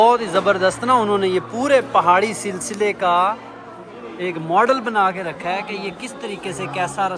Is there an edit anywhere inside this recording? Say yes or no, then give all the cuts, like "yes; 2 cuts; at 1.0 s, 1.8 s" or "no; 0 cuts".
no; 0 cuts